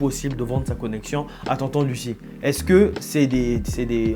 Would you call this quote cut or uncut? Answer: uncut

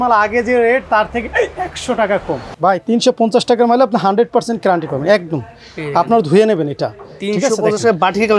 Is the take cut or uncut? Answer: cut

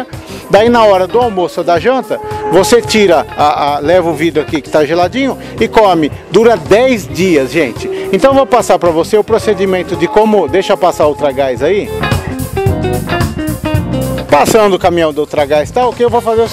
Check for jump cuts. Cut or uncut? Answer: uncut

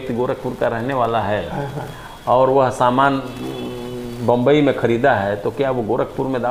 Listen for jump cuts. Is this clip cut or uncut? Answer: uncut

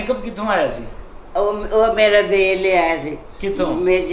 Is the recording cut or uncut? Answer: uncut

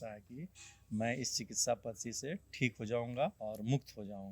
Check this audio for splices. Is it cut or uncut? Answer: cut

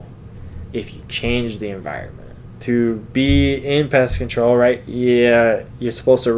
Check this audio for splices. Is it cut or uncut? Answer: cut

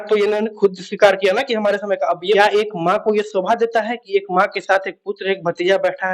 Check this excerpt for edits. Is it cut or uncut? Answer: cut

